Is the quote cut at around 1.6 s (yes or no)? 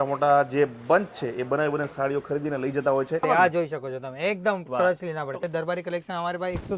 no